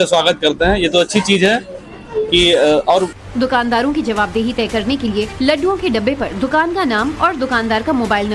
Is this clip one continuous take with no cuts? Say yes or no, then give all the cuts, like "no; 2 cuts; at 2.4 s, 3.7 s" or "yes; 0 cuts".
no; 1 cut; at 7.0 s